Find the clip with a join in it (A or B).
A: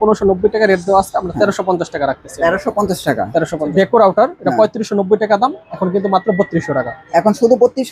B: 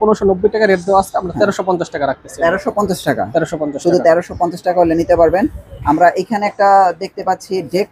A